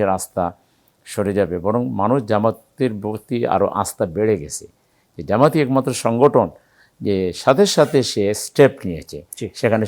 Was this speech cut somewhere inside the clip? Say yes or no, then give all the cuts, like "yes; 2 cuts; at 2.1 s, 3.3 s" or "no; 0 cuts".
no; 0 cuts